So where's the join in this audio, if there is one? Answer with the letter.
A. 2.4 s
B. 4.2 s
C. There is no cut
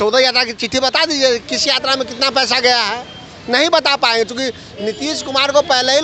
C